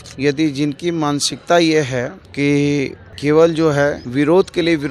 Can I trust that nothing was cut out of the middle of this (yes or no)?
no